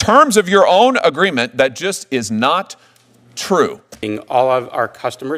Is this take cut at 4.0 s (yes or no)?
yes